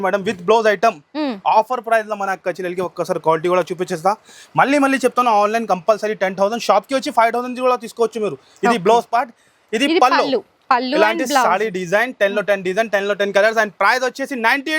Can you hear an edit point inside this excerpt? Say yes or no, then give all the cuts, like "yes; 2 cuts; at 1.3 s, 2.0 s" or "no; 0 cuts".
no; 0 cuts